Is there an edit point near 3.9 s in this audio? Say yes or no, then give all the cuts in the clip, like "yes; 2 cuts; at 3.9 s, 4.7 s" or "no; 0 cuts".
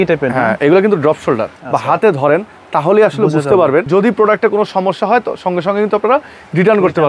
yes; 2 cuts; at 1.5 s, 3.9 s